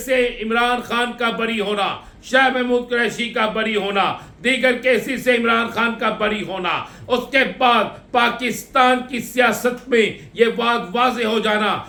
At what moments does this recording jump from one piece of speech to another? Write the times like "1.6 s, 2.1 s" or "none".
none